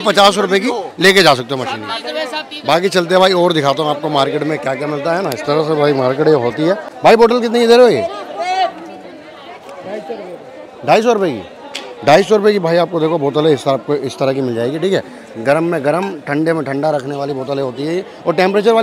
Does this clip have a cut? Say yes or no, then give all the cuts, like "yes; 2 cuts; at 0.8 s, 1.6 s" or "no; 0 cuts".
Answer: no; 0 cuts